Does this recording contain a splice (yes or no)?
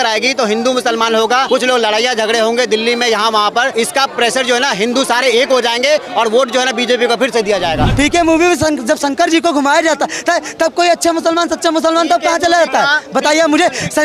yes